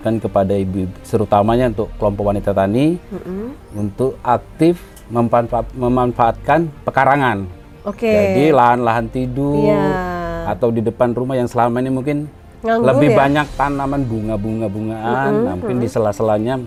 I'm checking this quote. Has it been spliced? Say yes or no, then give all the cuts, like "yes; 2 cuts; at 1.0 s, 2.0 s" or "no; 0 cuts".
no; 0 cuts